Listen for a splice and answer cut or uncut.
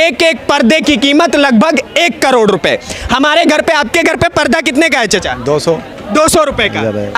uncut